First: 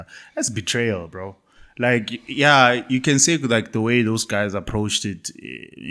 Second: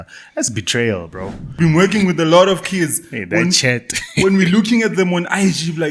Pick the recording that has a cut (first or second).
second